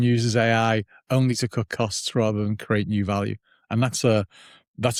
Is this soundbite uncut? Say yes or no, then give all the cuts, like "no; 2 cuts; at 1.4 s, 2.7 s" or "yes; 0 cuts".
yes; 0 cuts